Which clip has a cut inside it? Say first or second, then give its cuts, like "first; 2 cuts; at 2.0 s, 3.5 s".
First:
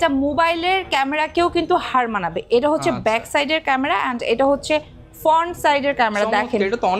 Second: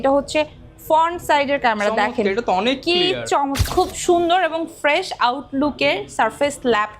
second; 1 cut; at 3.6 s